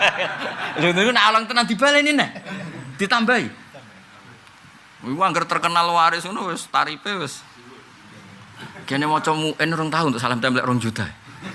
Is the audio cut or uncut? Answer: uncut